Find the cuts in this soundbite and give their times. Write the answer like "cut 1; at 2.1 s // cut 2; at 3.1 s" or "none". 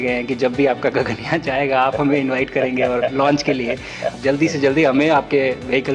cut 1; at 4.1 s